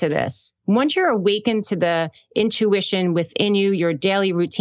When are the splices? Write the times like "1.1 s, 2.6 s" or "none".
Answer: none